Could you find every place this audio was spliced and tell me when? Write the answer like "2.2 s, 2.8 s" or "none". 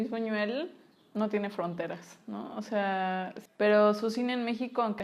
3.4 s